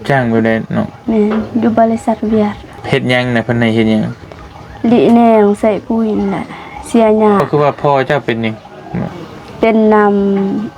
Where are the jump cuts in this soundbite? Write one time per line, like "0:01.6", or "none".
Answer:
0:02.7
0:07.5
0:09.2